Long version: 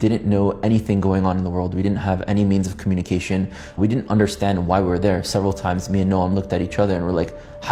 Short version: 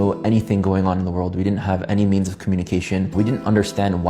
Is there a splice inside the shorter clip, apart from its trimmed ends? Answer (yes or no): yes